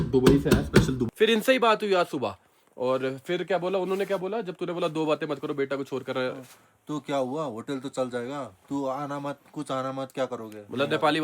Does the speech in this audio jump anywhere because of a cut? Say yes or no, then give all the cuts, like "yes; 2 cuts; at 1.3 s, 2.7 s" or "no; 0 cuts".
yes; 1 cut; at 1.0 s